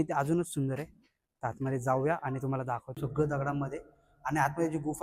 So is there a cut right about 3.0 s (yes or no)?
yes